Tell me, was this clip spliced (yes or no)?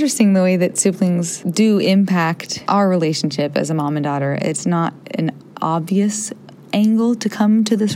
yes